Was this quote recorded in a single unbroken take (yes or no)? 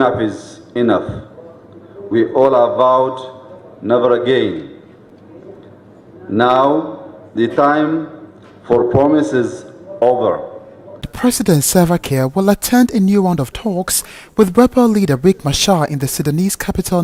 yes